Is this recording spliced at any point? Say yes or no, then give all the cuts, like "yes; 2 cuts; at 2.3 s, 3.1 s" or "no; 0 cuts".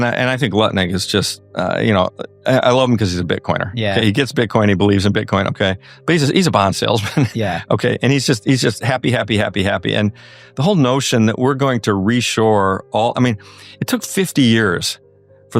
no; 0 cuts